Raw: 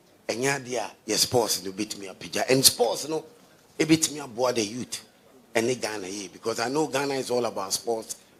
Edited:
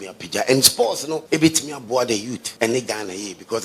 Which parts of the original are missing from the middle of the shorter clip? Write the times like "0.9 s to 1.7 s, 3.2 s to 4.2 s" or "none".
3.2 s to 3.7 s, 4.9 s to 5.3 s